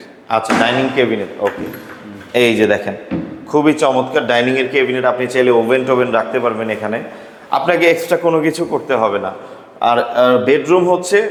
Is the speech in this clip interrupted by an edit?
no; 0 cuts

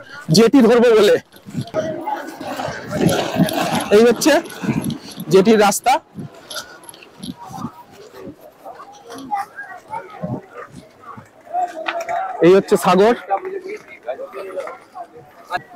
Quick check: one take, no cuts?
yes; 0 cuts

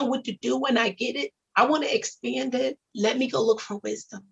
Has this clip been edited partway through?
yes; 1 cut; at 2.8 s

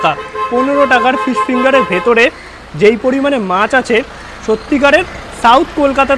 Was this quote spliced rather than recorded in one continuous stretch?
no; 0 cuts

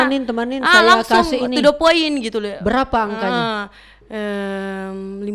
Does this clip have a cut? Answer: no; 0 cuts

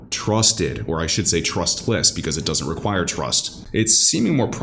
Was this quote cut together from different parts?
yes; 1 cut; at 3.5 s

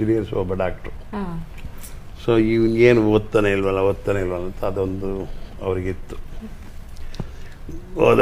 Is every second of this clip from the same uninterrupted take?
yes; 0 cuts

